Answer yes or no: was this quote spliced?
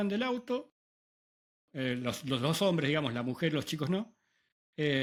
no